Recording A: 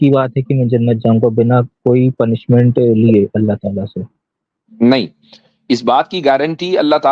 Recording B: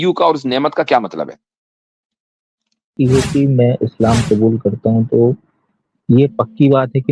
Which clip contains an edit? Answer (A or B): B